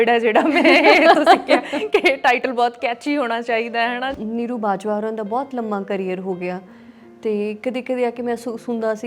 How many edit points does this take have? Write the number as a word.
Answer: one